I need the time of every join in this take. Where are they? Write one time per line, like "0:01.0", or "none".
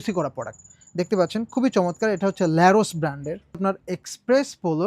0:03.6